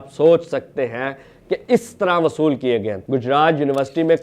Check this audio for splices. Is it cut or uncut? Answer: cut